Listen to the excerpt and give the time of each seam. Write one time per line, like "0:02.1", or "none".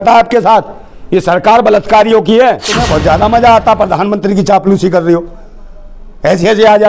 0:02.8